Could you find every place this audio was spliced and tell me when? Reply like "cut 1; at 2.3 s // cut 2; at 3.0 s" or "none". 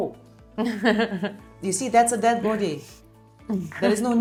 none